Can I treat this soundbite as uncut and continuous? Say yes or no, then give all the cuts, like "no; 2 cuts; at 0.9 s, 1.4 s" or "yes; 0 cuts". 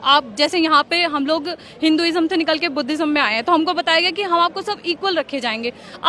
yes; 0 cuts